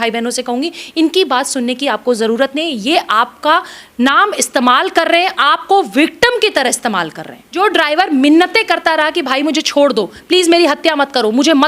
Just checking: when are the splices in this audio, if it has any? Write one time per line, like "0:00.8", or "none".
0:07.4